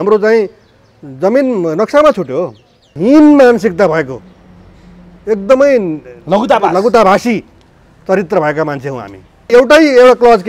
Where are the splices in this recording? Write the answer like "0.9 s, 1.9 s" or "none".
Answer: 3.0 s, 9.5 s